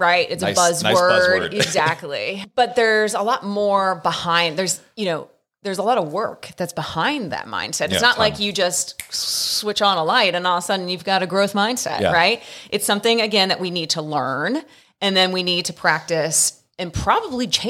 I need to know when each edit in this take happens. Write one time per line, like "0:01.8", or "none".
0:02.4